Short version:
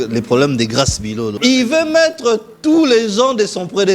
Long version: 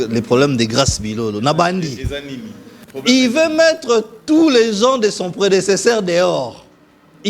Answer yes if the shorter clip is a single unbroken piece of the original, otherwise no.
no